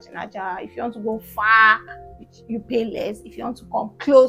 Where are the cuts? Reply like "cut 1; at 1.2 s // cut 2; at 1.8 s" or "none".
none